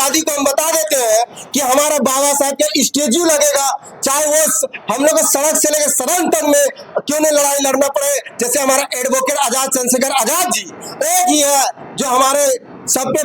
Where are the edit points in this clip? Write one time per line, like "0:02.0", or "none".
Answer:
none